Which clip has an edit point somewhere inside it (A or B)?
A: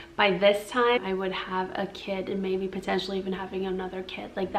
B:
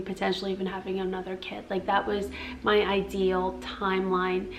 A